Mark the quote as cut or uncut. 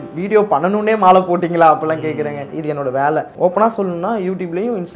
cut